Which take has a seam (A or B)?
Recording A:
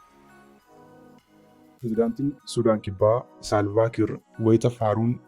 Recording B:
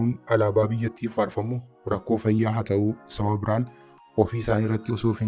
A